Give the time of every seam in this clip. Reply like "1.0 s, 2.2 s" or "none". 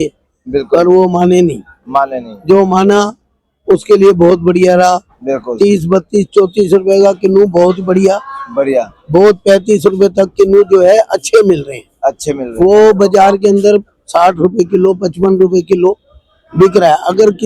5.1 s